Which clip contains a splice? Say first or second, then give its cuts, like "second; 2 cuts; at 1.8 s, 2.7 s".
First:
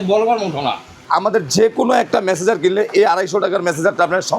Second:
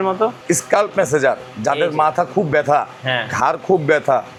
first; 1 cut; at 1.0 s